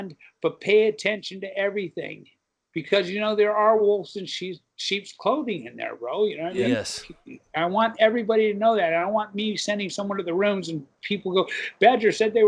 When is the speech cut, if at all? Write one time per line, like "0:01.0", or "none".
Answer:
none

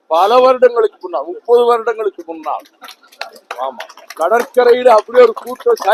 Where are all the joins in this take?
none

